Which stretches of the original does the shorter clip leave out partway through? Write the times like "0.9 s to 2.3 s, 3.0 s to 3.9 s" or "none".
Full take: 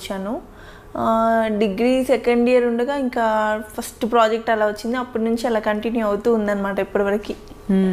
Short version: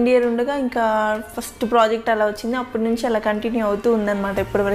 none